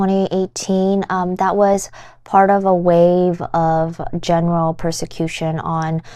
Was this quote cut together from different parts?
no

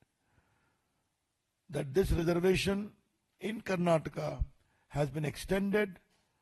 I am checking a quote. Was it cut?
no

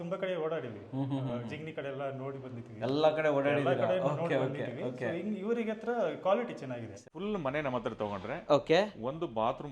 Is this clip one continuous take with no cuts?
no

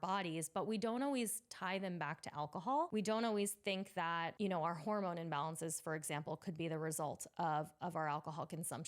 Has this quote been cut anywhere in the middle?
yes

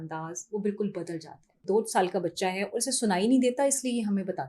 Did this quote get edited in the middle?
yes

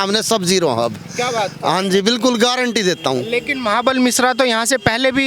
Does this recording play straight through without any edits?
yes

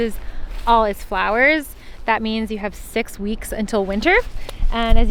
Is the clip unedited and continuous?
yes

